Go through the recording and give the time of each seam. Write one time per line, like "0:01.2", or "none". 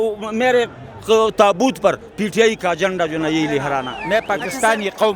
0:03.9